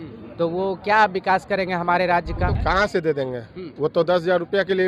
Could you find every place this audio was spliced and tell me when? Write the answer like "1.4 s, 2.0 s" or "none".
2.5 s